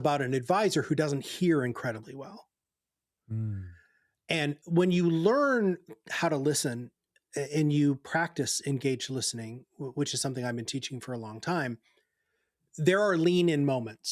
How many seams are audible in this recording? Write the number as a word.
one